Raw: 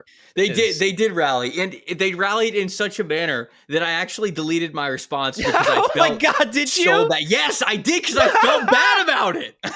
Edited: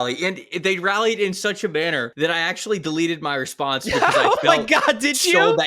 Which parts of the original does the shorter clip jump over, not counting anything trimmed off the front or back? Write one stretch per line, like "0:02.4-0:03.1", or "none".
0:03.4-0:03.6